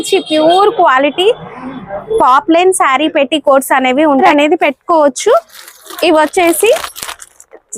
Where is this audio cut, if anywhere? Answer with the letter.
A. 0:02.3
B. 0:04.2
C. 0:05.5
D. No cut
B